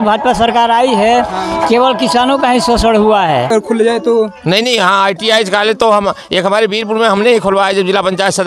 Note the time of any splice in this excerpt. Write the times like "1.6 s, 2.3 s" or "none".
3.5 s